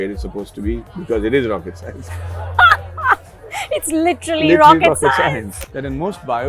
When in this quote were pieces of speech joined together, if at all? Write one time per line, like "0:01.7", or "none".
0:05.5